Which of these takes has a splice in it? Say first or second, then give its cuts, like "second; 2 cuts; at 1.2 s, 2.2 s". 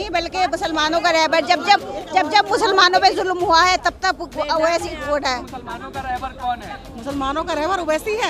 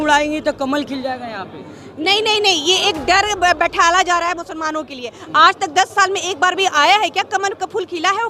first; 1 cut; at 5.5 s